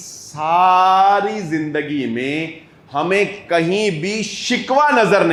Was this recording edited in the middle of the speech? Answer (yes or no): no